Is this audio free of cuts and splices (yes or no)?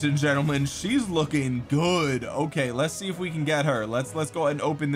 yes